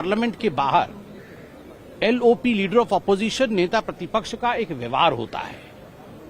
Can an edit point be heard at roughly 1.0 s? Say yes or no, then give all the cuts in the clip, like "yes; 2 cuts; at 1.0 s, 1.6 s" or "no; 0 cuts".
no; 0 cuts